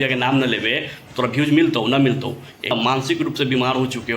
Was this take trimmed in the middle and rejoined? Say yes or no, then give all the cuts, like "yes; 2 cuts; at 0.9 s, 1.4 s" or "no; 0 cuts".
yes; 1 cut; at 2.7 s